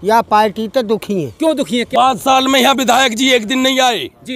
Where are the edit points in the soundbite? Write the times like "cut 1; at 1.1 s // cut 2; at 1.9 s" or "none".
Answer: cut 1; at 1.9 s